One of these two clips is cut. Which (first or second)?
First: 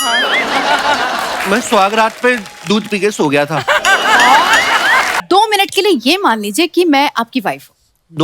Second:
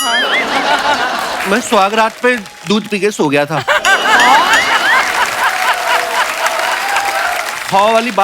first